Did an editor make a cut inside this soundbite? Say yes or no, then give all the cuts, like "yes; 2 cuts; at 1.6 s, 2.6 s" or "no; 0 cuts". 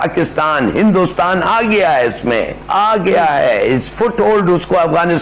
no; 0 cuts